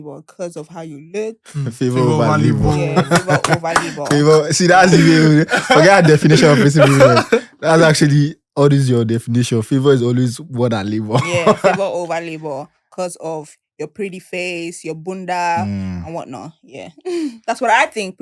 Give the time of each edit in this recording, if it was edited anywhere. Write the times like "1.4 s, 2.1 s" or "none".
none